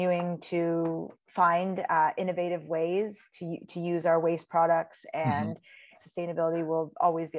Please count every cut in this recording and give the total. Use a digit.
2